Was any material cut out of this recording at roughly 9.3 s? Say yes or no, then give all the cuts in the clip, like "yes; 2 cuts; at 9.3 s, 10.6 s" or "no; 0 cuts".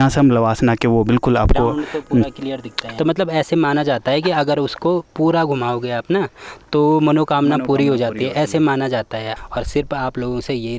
yes; 2 cuts; at 2.8 s, 9.3 s